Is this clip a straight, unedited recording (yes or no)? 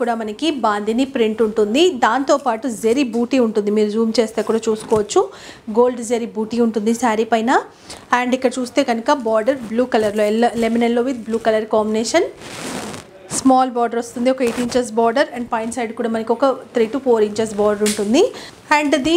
yes